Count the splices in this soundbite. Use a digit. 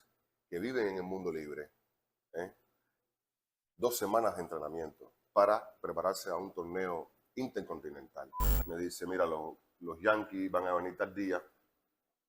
1